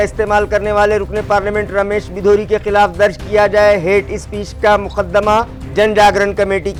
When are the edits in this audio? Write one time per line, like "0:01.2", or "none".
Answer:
none